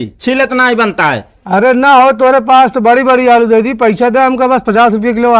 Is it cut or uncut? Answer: uncut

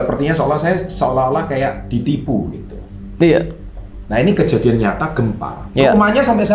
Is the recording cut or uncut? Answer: uncut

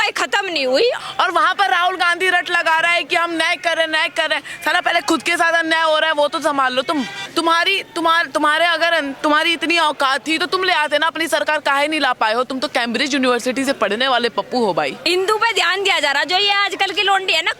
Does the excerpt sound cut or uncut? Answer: cut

